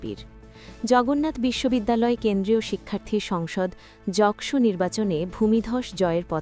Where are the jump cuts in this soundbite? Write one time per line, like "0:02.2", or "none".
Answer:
none